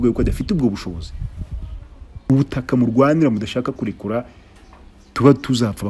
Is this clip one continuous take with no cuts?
no; 1 cut; at 2.2 s

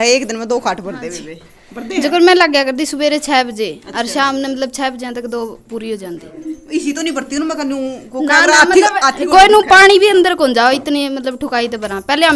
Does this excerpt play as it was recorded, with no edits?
yes; 0 cuts

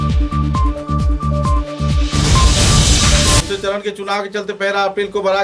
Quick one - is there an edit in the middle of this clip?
yes; 1 cut; at 3.4 s

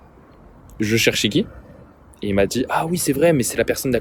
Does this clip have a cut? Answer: no; 0 cuts

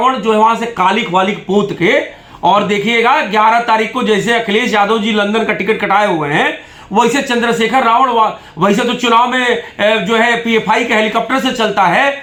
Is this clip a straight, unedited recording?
yes; 0 cuts

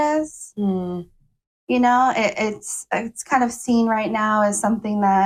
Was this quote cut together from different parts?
no; 0 cuts

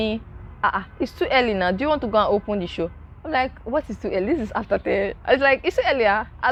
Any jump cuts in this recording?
no; 0 cuts

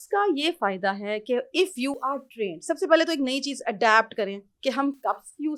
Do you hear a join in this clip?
no; 0 cuts

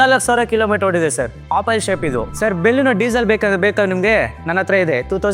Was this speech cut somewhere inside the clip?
yes; 2 cuts; at 1.4 s, 2.3 s

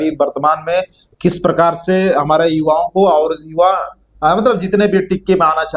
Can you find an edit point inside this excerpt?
no; 0 cuts

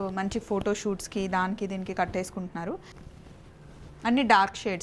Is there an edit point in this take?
yes; 1 cut; at 2.9 s

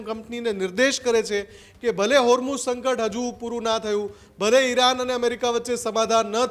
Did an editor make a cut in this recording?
no; 0 cuts

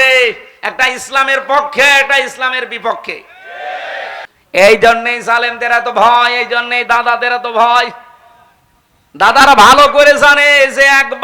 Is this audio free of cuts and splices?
no; 1 cut; at 4.3 s

